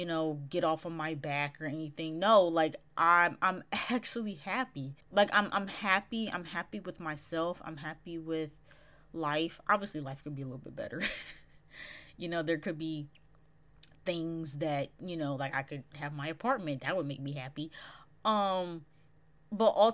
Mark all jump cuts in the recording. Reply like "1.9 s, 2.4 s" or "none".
none